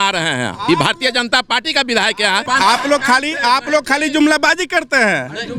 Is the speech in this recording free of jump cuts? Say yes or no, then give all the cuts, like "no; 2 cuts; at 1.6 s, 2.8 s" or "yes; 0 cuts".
no; 1 cut; at 2.4 s